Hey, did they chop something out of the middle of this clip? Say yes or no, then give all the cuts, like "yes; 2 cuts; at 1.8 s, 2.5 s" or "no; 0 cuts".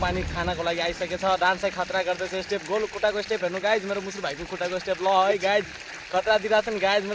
no; 0 cuts